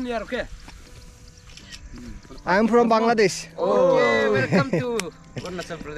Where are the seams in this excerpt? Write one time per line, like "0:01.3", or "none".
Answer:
none